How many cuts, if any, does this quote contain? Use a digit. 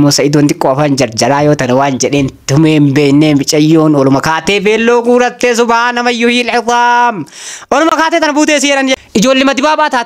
0